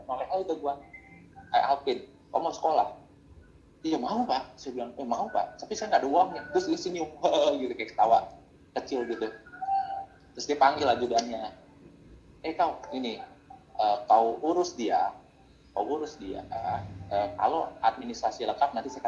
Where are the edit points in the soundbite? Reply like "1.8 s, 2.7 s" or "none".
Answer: none